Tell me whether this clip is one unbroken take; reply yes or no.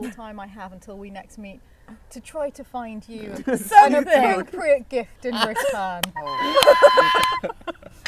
yes